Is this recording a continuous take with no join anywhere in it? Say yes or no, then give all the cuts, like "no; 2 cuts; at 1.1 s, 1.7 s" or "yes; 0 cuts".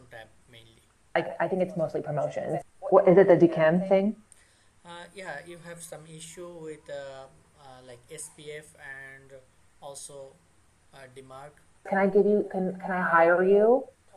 no; 2 cuts; at 2.6 s, 11.9 s